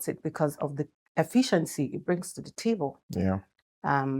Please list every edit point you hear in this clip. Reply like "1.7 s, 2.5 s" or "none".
none